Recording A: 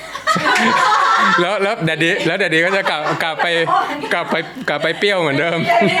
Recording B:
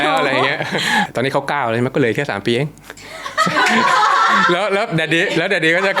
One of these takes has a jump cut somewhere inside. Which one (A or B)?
B